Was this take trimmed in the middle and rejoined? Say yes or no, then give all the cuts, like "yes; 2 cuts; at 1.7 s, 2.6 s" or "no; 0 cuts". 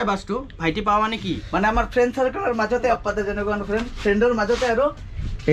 yes; 2 cuts; at 1.4 s, 2.9 s